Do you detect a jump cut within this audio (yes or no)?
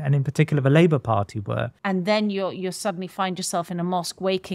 yes